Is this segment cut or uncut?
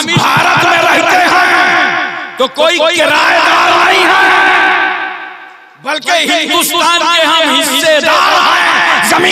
uncut